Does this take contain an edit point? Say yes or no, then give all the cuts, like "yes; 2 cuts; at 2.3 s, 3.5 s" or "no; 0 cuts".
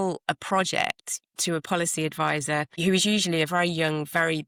no; 0 cuts